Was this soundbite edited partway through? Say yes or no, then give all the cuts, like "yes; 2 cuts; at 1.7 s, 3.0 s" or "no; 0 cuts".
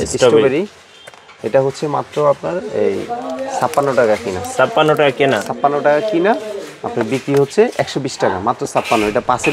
no; 0 cuts